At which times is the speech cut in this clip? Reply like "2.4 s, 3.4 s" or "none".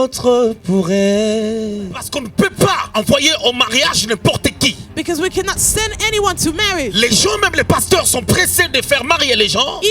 2.2 s